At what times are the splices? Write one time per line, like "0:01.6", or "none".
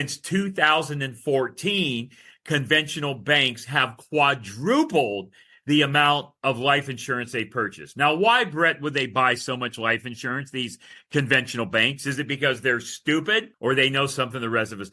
0:13.5